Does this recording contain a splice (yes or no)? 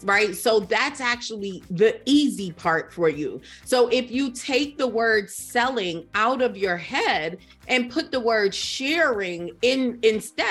no